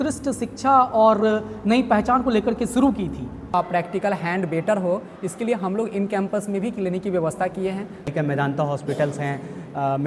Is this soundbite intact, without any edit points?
no; 2 cuts; at 3.5 s, 8.1 s

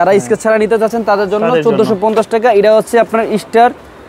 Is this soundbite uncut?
yes; 0 cuts

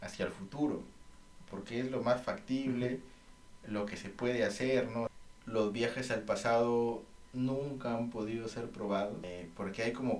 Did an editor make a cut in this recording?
yes; 2 cuts; at 5.1 s, 9.3 s

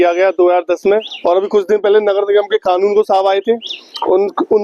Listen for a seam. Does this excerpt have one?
yes; 1 cut; at 1.1 s

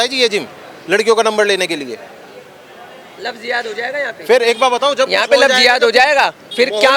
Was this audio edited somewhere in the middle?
no; 0 cuts

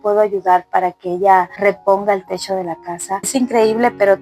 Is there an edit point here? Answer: yes; 1 cut; at 3.2 s

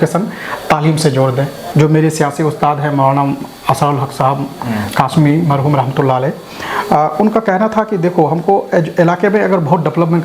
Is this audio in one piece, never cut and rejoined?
no; 1 cut; at 1.6 s

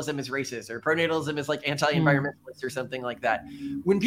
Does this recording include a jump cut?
no; 0 cuts

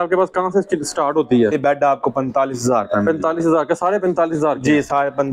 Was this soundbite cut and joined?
yes; 1 cut; at 1.5 s

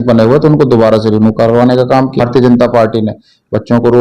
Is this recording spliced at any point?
yes; 1 cut; at 2.2 s

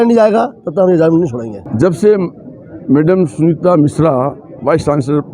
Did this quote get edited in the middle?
yes; 1 cut; at 1.6 s

